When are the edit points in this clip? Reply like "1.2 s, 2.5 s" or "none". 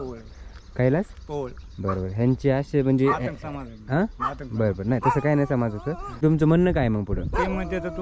6.2 s